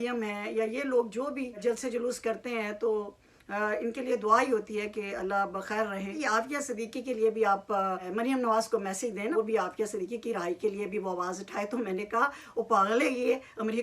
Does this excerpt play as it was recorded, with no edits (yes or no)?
no